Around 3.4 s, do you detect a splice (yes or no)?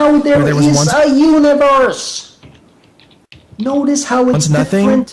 no